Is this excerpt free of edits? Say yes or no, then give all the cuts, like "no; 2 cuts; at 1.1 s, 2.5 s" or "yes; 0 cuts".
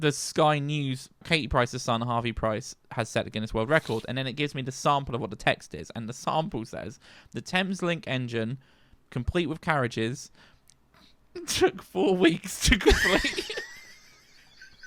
no; 1 cut; at 1.2 s